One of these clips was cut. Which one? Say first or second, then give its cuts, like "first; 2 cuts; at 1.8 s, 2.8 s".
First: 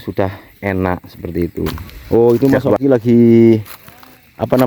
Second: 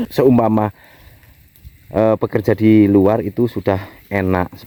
first; 1 cut; at 2.2 s